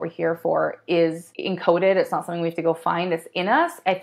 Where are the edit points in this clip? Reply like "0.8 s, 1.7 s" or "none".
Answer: 1.3 s

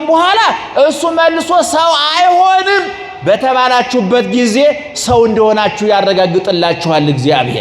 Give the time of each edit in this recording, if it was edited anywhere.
none

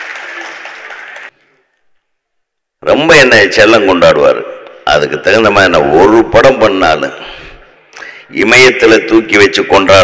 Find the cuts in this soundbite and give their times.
1.3 s

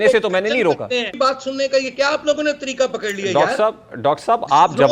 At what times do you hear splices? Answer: 1.1 s

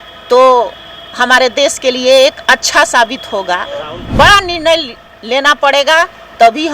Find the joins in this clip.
4.0 s

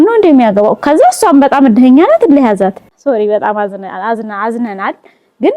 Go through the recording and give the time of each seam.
2.8 s

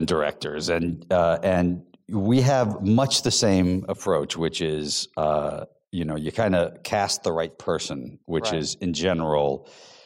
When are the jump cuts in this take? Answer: none

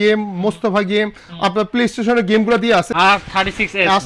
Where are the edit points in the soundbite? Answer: 2.9 s

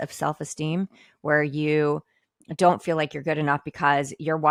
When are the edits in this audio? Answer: none

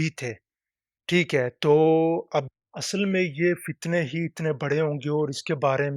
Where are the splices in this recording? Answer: 2.5 s

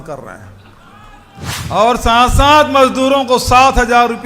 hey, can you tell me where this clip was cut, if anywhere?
1.6 s

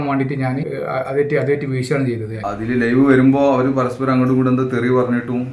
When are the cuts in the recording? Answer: 2.3 s

